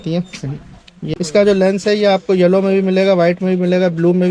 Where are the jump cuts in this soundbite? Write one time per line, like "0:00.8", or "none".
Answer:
0:00.9